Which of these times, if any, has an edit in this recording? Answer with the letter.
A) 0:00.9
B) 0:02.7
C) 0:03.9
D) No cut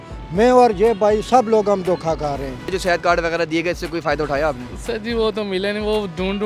B